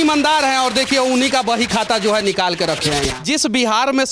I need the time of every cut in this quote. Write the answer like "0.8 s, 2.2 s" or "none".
3.2 s

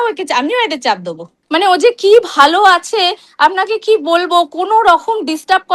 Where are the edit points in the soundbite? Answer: 1.3 s

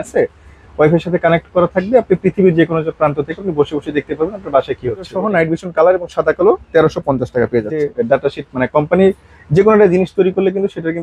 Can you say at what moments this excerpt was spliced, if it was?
5.2 s, 7.9 s

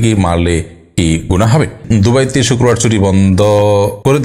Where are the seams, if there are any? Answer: 1.8 s

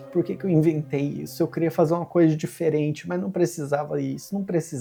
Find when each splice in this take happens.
none

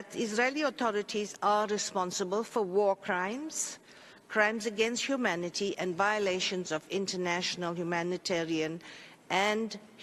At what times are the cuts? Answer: none

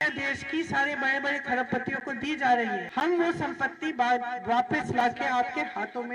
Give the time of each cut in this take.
2.9 s

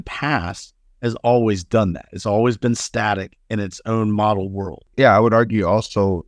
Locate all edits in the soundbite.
4.8 s

